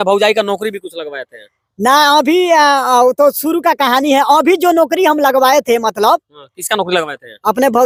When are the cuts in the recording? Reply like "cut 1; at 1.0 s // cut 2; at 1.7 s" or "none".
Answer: none